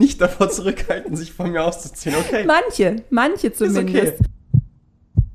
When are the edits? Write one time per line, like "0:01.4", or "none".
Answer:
0:04.3